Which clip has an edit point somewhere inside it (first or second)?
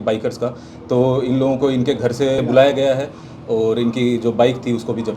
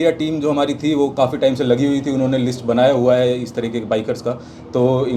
first